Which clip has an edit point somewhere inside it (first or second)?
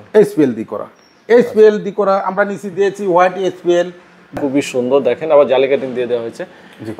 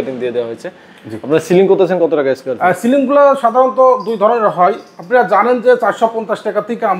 first